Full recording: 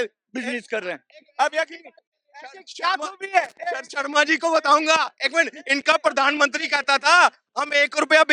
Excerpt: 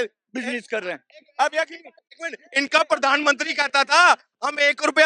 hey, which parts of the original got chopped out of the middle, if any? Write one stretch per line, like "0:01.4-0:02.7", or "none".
0:02.4-0:05.6